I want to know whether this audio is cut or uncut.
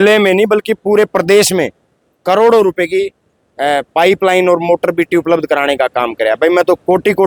uncut